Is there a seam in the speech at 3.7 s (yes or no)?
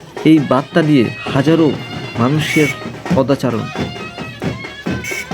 yes